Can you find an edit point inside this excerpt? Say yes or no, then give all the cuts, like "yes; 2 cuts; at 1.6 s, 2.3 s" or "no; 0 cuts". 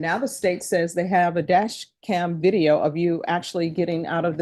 no; 0 cuts